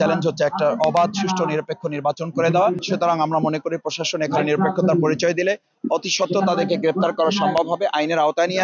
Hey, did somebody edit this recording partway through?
yes; 1 cut; at 2.8 s

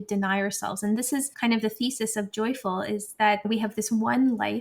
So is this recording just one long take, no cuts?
no; 2 cuts; at 1.3 s, 3.4 s

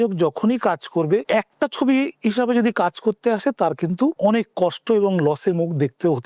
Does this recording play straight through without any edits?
no; 2 cuts; at 1.2 s, 4.2 s

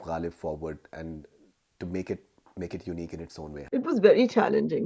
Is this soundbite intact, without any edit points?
no; 1 cut; at 3.6 s

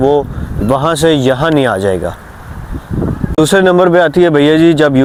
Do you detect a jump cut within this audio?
no; 0 cuts

